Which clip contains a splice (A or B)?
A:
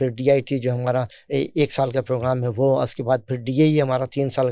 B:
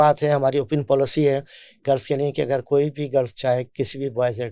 A